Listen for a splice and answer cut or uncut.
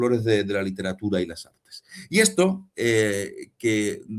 uncut